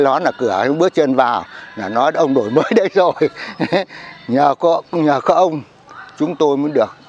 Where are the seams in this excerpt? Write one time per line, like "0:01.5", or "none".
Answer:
none